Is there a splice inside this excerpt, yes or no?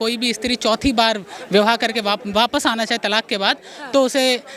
no